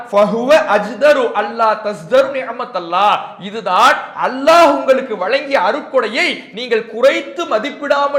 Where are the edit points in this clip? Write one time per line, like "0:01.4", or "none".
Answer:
none